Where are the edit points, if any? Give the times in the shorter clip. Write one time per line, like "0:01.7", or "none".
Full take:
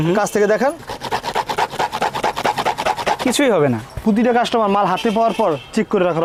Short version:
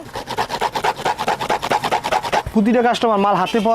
0:02.4